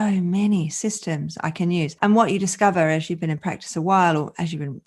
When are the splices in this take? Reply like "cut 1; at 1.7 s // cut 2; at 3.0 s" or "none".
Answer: cut 1; at 1.9 s